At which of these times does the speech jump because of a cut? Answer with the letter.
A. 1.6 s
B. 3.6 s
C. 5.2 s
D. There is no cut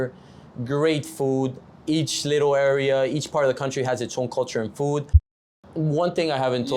C